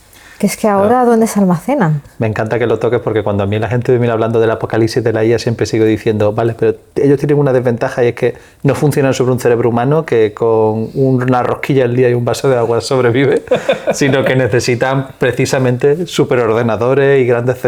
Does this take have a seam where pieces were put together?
no; 0 cuts

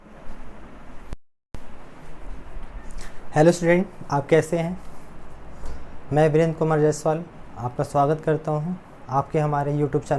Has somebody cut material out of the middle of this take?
no; 0 cuts

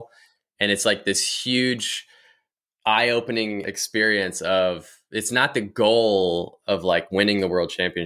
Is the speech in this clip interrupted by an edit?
yes; 1 cut; at 3.7 s

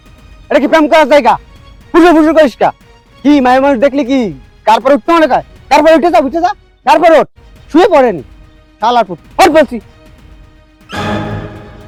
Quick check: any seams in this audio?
no; 0 cuts

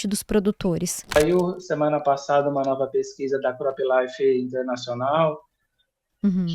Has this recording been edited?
yes; 1 cut; at 1.2 s

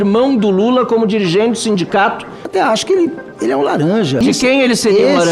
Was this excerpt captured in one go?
no; 2 cuts; at 2.4 s, 4.2 s

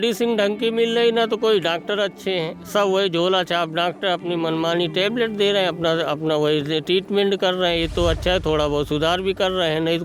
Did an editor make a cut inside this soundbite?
no; 0 cuts

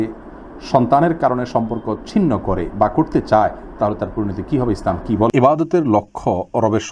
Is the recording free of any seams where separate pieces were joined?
no; 1 cut; at 5.3 s

